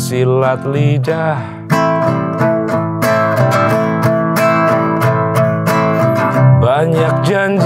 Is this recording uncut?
yes; 0 cuts

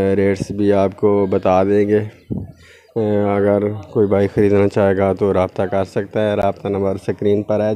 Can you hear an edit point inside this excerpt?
no; 0 cuts

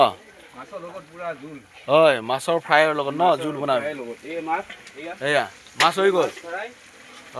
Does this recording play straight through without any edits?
yes; 0 cuts

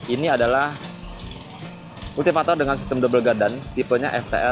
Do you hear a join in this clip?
no; 0 cuts

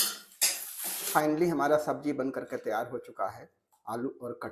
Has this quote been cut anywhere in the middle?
yes; 1 cut; at 1.1 s

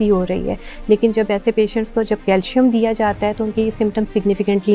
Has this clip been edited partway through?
no; 0 cuts

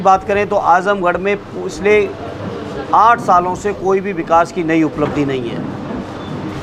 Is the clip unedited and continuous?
yes; 0 cuts

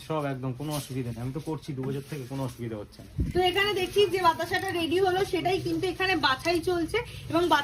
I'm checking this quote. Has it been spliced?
yes; 1 cut; at 3.2 s

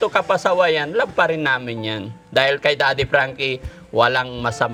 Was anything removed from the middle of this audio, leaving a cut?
no; 0 cuts

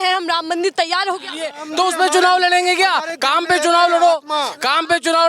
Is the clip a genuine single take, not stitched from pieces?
no; 1 cut; at 1.6 s

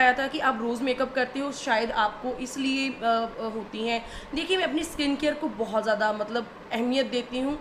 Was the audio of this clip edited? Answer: no; 0 cuts

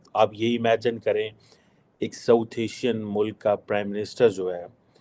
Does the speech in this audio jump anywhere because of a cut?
no; 0 cuts

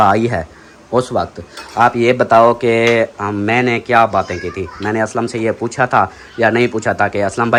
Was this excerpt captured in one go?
yes; 0 cuts

